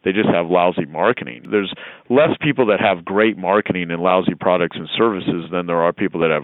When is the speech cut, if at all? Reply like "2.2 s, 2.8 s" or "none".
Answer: 1.4 s